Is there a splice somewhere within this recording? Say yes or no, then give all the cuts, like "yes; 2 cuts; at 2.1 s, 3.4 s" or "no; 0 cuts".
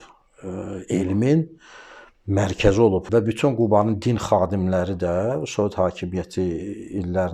yes; 1 cut; at 3.1 s